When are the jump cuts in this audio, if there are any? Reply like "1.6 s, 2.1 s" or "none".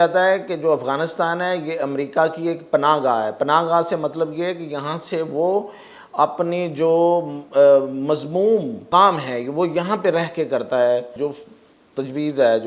8.8 s, 11.2 s